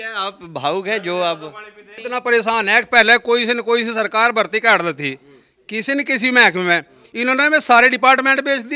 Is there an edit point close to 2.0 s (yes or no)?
yes